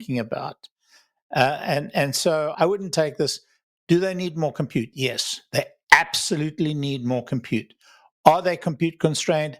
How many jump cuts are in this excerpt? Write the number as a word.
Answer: one